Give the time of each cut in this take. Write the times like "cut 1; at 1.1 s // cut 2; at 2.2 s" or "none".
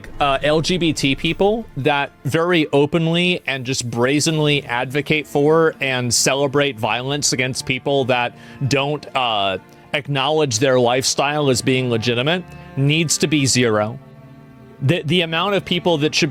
none